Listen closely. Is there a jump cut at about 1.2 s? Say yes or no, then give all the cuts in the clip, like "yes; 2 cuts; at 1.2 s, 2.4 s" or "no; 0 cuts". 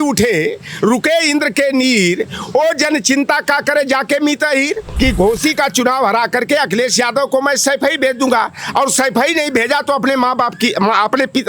no; 1 cut; at 4.9 s